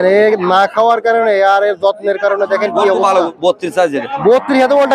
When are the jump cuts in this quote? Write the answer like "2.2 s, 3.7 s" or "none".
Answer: 3.1 s